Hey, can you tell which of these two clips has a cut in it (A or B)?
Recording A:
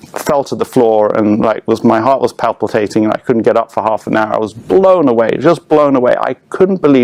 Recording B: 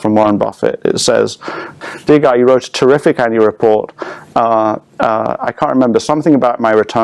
B